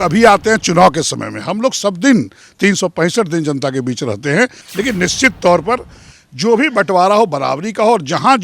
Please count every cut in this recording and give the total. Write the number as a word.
one